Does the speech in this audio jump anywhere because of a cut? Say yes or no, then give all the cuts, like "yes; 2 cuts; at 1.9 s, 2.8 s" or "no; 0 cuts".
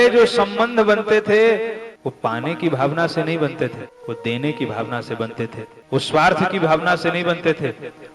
yes; 3 cuts; at 1.9 s, 3.9 s, 5.7 s